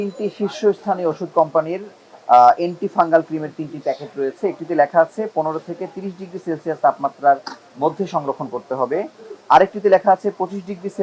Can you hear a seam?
no; 0 cuts

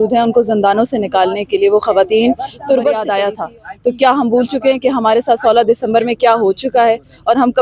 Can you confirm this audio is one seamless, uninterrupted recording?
no; 1 cut; at 3.1 s

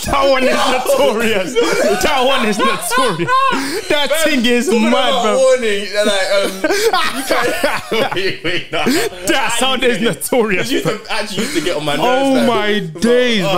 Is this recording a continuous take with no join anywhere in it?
yes; 0 cuts

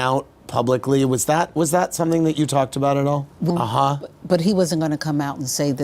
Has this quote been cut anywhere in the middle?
yes; 1 cut; at 3.5 s

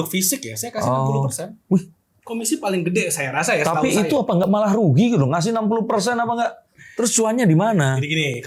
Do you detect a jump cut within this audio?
no; 0 cuts

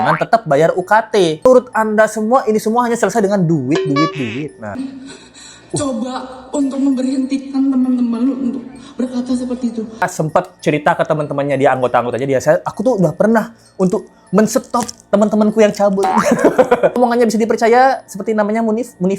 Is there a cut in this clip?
yes; 4 cuts; at 1.4 s, 4.8 s, 10.0 s, 17.0 s

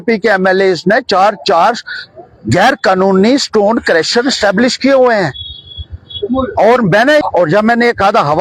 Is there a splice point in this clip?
yes; 1 cut; at 7.2 s

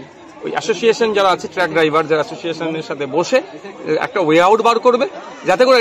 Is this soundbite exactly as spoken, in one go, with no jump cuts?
yes; 0 cuts

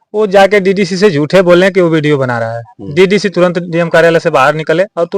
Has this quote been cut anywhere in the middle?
no; 0 cuts

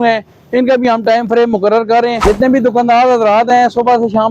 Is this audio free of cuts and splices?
no; 1 cut; at 2.2 s

